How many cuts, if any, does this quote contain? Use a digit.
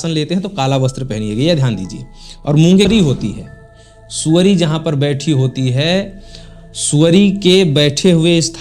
1